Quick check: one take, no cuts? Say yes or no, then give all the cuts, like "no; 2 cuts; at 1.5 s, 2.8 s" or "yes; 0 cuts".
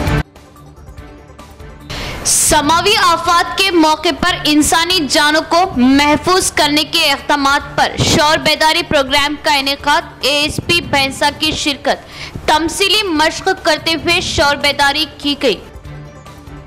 no; 1 cut; at 1.9 s